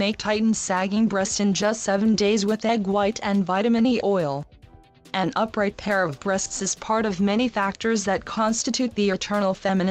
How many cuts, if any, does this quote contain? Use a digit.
1